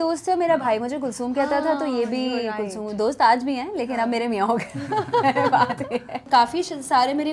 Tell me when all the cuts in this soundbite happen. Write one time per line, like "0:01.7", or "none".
0:06.2